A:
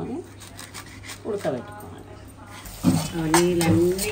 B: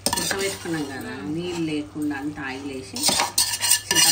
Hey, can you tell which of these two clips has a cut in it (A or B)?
A